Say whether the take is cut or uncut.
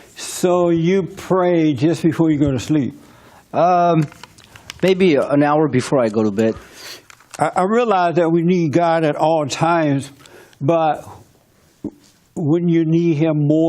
cut